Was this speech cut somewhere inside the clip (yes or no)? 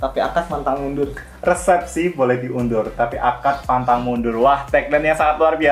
no